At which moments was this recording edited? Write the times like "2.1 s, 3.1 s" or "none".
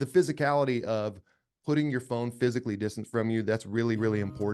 none